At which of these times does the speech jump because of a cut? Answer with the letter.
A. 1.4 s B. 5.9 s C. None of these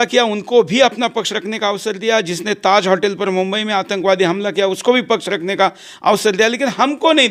C